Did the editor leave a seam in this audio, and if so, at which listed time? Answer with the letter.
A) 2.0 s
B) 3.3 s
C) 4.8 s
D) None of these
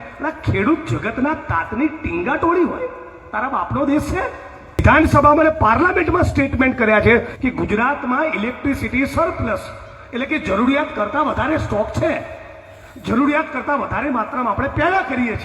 C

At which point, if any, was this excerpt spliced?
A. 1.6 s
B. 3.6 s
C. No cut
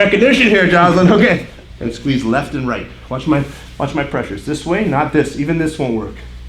A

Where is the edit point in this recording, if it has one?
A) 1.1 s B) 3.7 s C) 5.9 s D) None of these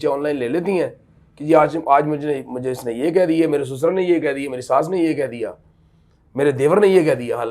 D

